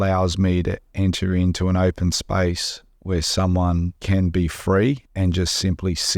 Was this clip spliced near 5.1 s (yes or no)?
yes